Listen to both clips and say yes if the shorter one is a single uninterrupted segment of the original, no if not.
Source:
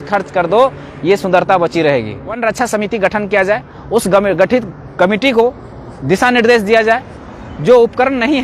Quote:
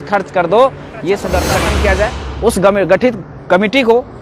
no